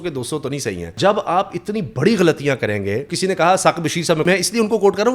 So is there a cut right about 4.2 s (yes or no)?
yes